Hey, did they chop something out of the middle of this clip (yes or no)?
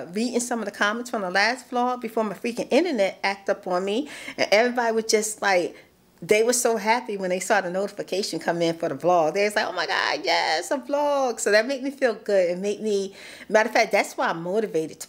no